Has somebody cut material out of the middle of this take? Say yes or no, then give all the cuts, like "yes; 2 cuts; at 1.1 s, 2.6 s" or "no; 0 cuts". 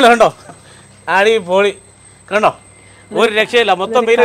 no; 0 cuts